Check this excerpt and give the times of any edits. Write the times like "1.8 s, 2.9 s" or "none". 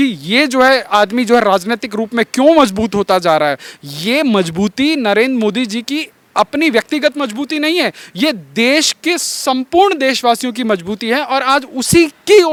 none